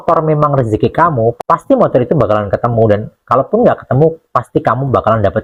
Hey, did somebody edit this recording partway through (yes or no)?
no